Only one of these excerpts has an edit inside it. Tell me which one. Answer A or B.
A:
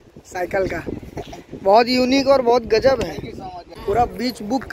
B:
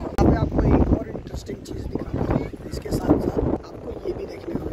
A